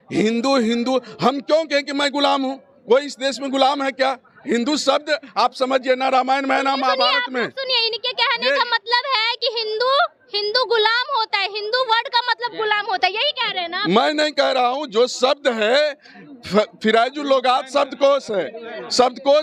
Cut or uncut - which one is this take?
uncut